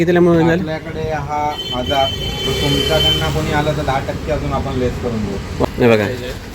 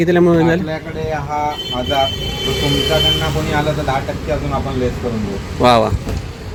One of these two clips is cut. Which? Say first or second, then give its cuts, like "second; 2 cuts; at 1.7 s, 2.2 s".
first; 1 cut; at 5.6 s